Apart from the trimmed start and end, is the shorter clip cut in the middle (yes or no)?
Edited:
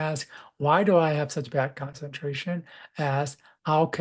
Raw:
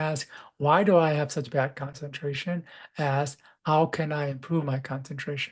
no